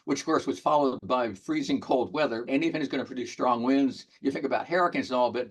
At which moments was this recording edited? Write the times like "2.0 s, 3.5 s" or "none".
2.5 s